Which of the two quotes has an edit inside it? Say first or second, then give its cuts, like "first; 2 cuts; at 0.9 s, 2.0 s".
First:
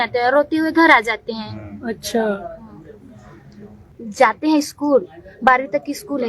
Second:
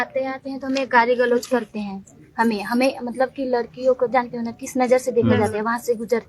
first; 1 cut; at 4.0 s